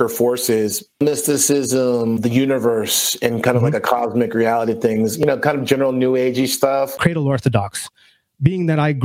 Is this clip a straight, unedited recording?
no; 3 cuts; at 1.0 s, 2.2 s, 7.0 s

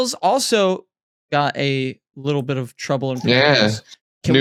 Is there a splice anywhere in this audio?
no; 0 cuts

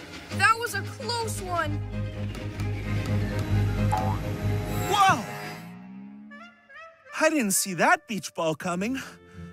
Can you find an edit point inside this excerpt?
no; 0 cuts

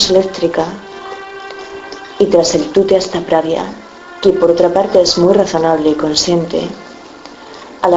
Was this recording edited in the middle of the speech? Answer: yes; 1 cut; at 6.8 s

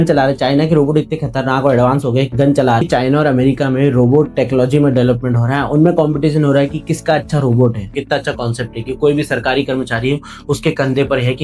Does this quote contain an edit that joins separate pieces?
yes; 2 cuts; at 2.8 s, 7.9 s

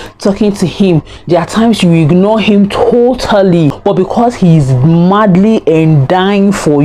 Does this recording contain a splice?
yes; 1 cut; at 3.8 s

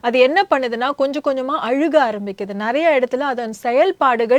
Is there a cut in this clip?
no; 0 cuts

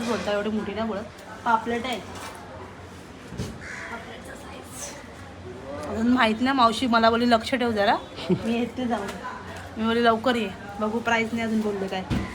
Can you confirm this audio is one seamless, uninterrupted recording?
yes; 0 cuts

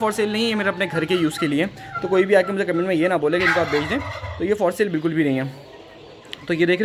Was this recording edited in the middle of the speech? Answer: no; 0 cuts

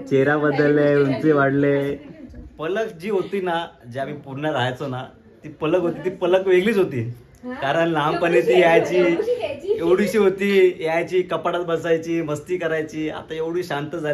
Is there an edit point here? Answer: no; 0 cuts

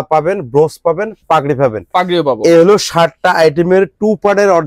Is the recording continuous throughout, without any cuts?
yes; 0 cuts

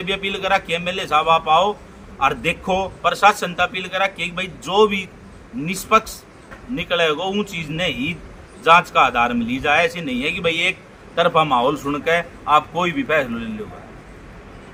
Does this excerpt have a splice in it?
no; 0 cuts

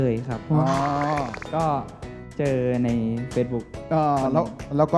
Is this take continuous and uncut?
yes; 0 cuts

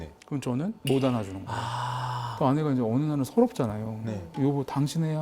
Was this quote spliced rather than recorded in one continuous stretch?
yes; 1 cut; at 2.3 s

